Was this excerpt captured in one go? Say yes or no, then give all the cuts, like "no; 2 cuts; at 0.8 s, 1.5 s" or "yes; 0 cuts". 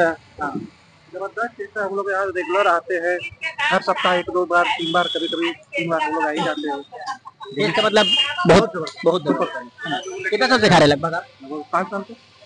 yes; 0 cuts